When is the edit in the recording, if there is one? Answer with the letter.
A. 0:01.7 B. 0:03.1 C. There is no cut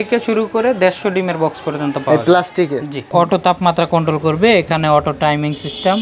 B